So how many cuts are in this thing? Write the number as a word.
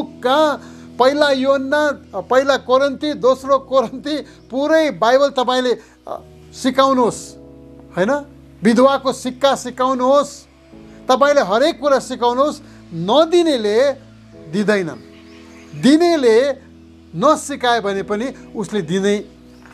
zero